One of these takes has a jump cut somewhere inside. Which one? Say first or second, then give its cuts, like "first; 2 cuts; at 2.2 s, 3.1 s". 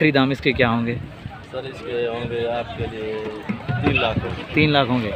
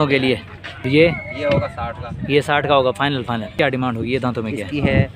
second; 2 cuts; at 0.9 s, 3.6 s